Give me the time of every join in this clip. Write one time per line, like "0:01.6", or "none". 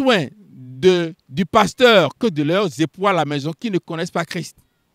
0:01.2

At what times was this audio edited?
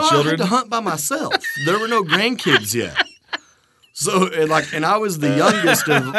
none

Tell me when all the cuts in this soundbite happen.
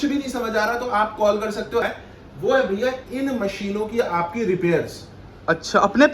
0:01.8

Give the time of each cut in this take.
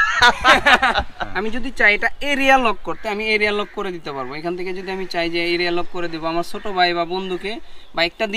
0:01.2

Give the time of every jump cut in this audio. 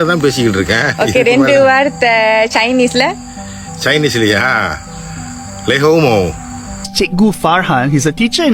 0:06.9

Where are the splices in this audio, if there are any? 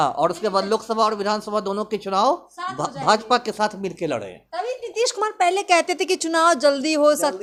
none

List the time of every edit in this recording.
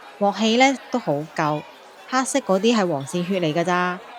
none

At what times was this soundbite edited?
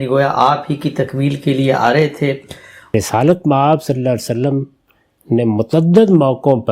0:02.9

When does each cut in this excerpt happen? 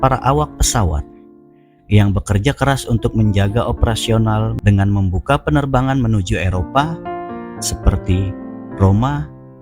0:04.5

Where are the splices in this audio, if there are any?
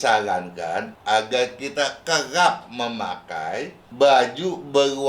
0:03.8

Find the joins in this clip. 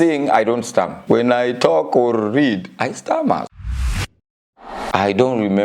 0:01.0
0:03.5
0:04.9

